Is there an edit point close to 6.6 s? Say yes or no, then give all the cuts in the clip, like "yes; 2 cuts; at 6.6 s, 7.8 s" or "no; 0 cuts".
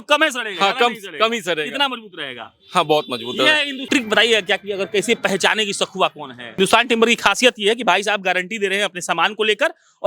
yes; 2 cuts; at 3.8 s, 6.6 s